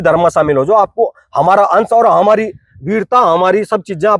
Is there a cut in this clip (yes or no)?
no